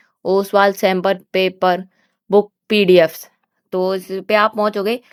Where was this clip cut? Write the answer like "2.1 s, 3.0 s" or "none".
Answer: none